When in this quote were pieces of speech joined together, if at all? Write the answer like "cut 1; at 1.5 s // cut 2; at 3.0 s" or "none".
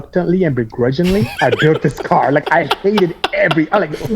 cut 1; at 1.3 s